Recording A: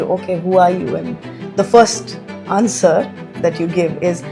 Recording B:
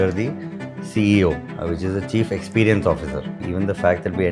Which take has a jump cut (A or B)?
B